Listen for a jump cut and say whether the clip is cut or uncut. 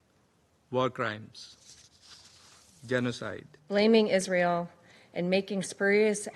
cut